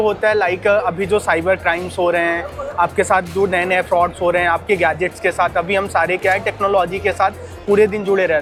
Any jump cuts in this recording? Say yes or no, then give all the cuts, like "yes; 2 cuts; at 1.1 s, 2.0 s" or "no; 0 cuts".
no; 0 cuts